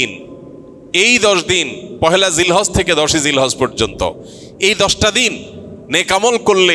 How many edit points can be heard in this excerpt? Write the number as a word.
zero